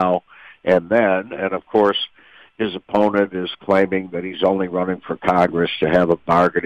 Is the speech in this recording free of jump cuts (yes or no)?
yes